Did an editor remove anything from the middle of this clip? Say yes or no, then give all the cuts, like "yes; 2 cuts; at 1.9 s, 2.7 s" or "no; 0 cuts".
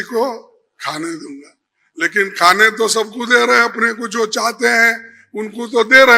no; 0 cuts